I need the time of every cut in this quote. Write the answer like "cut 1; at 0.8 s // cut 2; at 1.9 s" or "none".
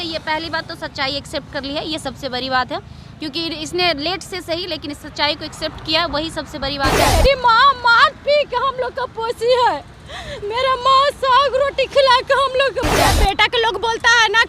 cut 1; at 7.1 s // cut 2; at 13.0 s